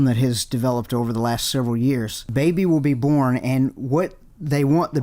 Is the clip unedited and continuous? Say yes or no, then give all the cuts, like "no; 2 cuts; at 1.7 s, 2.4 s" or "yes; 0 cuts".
no; 1 cut; at 2.2 s